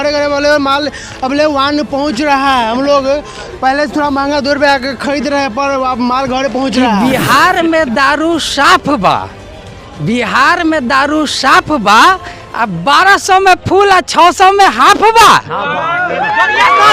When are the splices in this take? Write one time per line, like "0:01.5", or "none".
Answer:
0:06.8